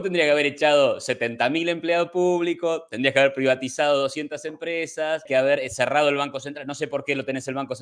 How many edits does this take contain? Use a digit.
1